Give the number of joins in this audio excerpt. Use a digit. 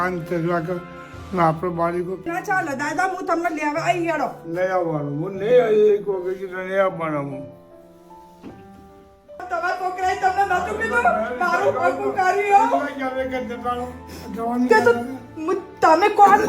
2